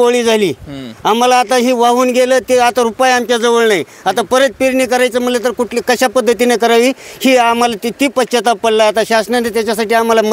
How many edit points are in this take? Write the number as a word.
zero